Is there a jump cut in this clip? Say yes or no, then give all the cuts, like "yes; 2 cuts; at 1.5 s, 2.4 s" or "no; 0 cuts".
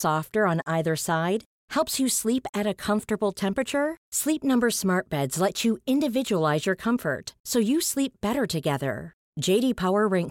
no; 0 cuts